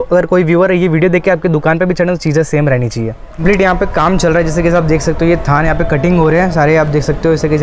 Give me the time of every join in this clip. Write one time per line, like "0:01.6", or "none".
0:03.4